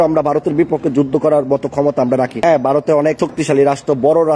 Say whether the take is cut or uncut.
cut